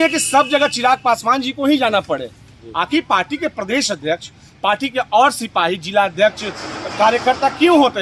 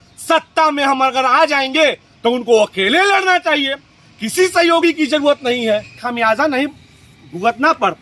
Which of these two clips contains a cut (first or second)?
second